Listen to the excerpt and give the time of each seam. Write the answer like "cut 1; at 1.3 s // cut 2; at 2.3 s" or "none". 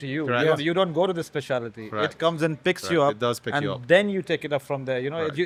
none